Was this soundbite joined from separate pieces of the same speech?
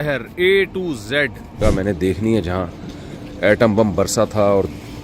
yes; 1 cut; at 1.6 s

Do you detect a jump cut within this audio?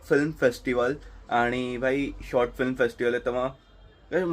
no; 0 cuts

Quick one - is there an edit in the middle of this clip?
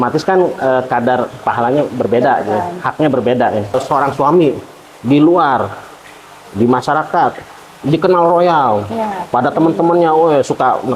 yes; 1 cut; at 4.0 s

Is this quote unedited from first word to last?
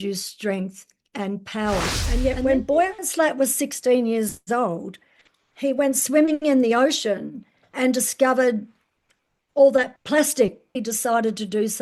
no; 2 cuts; at 2.0 s, 10.7 s

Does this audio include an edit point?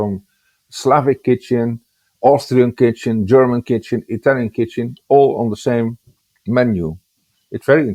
no; 0 cuts

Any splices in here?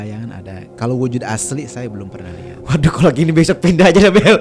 no; 0 cuts

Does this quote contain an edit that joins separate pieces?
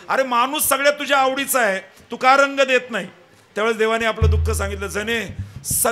no; 0 cuts

